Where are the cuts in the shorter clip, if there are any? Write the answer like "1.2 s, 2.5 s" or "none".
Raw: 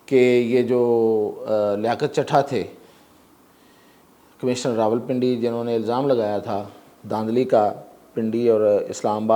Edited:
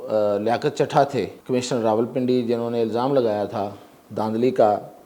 1.4 s